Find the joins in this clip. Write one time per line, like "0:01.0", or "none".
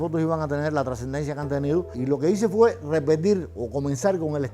0:02.0